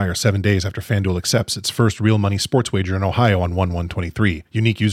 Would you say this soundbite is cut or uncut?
uncut